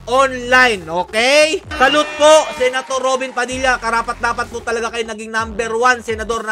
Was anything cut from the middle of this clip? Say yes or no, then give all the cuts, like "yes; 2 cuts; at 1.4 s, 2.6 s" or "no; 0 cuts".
yes; 1 cut; at 1.7 s